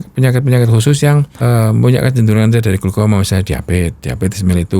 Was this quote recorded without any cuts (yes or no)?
no